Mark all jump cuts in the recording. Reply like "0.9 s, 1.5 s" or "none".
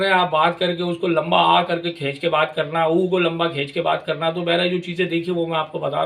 none